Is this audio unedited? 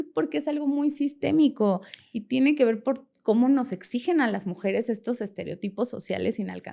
yes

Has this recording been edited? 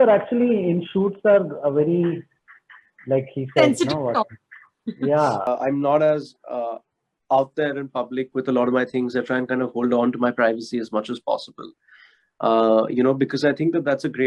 yes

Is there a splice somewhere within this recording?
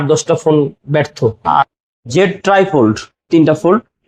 yes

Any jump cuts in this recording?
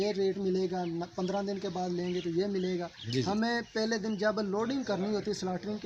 no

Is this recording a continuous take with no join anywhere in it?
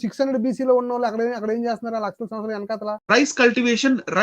no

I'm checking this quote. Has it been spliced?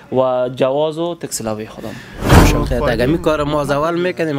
yes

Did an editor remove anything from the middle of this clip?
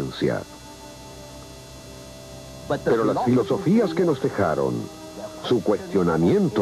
yes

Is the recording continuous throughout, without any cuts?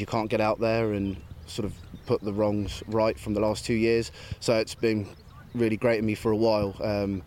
yes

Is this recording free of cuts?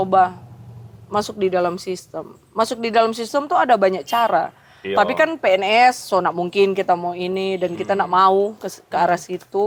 yes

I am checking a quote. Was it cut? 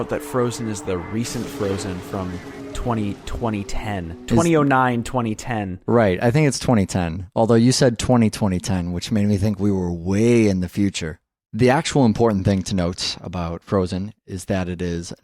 no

